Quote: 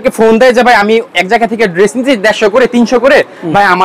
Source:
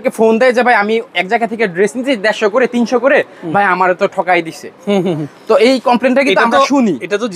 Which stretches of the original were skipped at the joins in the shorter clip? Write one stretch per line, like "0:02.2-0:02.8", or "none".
none

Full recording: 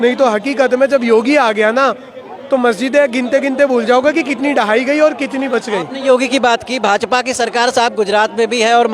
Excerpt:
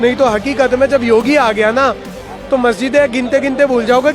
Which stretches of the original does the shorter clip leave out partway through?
none

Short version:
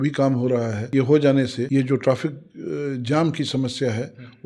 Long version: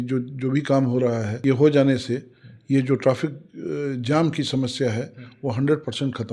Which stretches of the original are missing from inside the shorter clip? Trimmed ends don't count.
0:02.1-0:02.6

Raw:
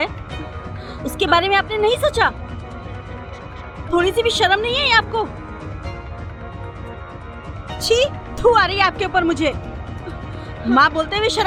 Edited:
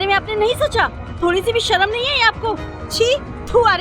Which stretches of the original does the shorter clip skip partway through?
0:02.5-0:03.7
0:05.5-0:07.7

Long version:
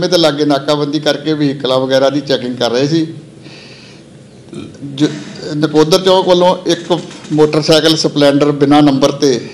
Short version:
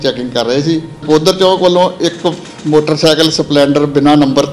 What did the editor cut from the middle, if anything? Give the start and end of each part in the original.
0:03.3-0:05.7

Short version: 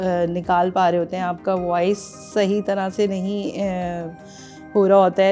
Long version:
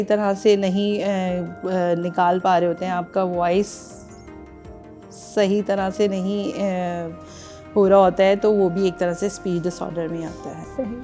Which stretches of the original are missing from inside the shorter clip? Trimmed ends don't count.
0:03.8-0:05.2

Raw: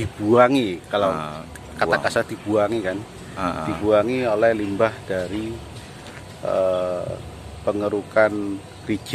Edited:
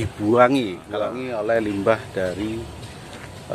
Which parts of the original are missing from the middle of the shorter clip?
0:01.1-0:04.1

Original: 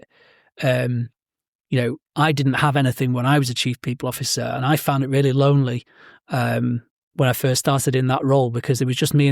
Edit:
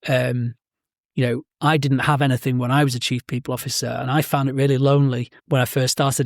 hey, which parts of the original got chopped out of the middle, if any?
0:05.9-0:07.0

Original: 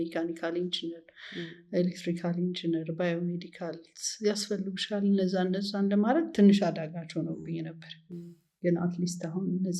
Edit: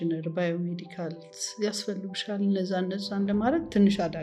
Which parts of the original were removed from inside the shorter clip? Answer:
none

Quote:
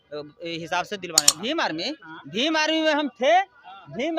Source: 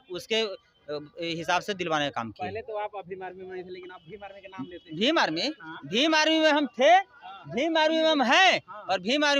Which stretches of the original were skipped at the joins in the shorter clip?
0:02.0-0:04.8

